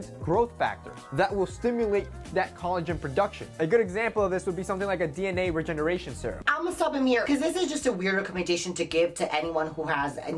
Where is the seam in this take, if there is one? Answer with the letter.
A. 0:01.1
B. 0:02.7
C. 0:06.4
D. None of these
C